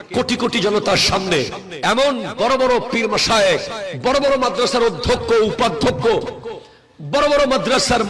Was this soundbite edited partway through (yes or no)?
no